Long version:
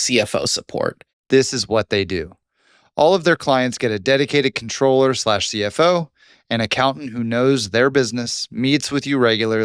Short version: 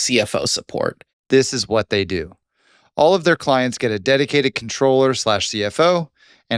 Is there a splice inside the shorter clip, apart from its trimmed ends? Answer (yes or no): no